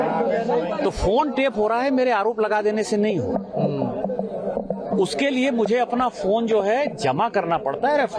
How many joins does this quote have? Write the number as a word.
zero